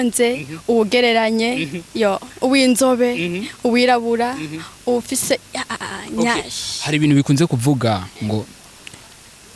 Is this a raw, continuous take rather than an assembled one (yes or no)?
yes